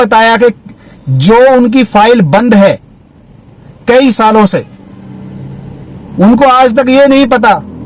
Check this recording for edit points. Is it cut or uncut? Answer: uncut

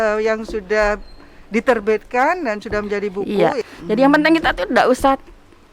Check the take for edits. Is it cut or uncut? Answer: cut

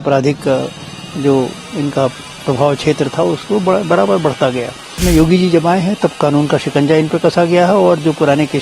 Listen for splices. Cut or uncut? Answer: cut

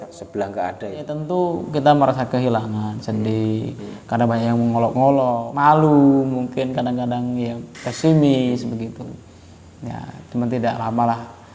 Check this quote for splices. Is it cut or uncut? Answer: cut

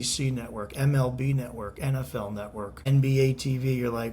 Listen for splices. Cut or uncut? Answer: cut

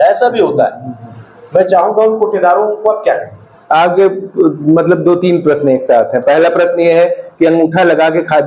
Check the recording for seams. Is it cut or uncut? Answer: uncut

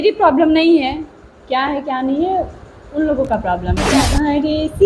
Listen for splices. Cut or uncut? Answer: cut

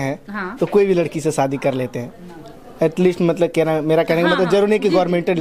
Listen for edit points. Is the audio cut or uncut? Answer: uncut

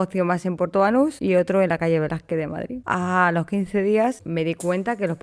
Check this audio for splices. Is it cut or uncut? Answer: cut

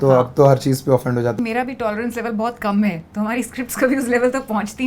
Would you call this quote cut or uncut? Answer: cut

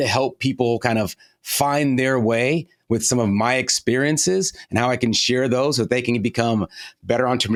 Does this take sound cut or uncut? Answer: uncut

